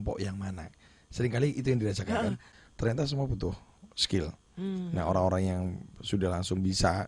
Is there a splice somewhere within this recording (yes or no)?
yes